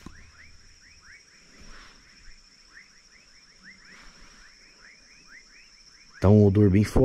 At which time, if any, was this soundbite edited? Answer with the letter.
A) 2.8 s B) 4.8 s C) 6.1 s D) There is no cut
D